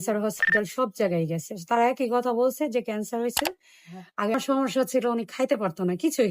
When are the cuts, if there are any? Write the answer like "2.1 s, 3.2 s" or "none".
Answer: 4.3 s